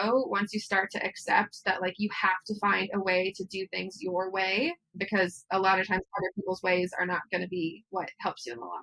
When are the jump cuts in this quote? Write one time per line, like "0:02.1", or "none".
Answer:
0:07.8